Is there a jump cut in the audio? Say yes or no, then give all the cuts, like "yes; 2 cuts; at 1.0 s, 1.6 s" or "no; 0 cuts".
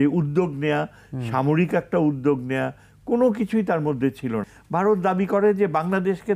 yes; 1 cut; at 4.5 s